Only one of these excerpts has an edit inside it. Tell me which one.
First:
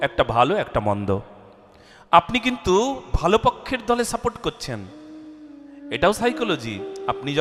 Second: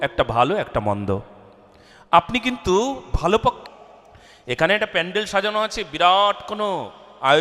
second; 1 cut; at 3.6 s

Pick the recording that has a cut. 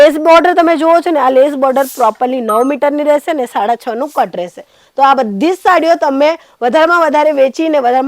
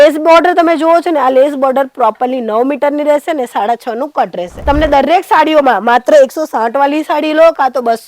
second; 1 cut; at 4.5 s

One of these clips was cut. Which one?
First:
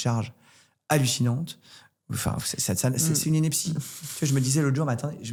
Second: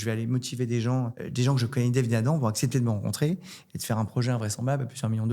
second; 1 cut; at 1.2 s

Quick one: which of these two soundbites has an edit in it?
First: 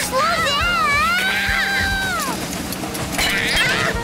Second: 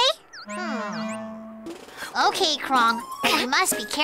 second; 1 cut; at 1.7 s

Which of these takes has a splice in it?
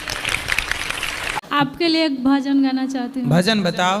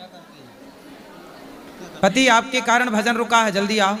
first; 1 cut; at 1.4 s

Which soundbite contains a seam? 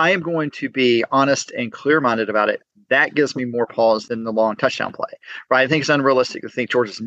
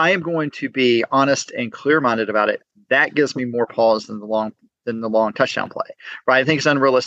first; 1 cut; at 4.1 s

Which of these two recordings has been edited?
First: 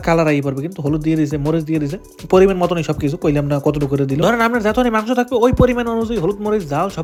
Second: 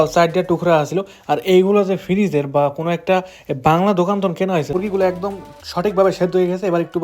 second; 1 cut; at 4.7 s

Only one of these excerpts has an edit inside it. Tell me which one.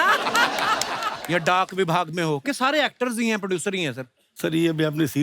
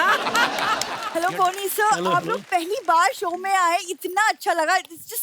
second; 1 cut; at 1.0 s

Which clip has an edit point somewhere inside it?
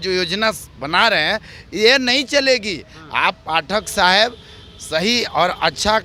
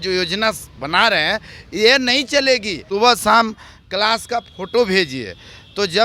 second; 1 cut; at 2.8 s

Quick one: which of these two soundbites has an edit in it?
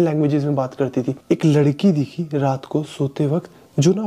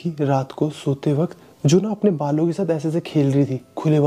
first; 1 cut; at 1.1 s

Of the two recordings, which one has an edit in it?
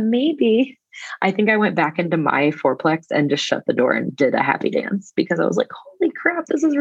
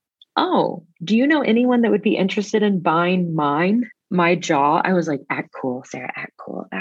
second; 1 cut; at 4.0 s

